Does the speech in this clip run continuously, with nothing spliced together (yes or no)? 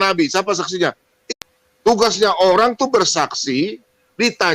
no